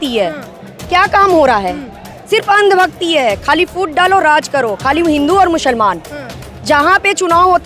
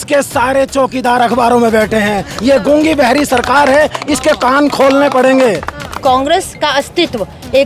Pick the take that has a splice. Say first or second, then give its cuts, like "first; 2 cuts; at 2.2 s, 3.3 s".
second; 2 cuts; at 2.3 s, 5.9 s